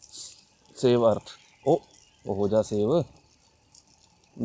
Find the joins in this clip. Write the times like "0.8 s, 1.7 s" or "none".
none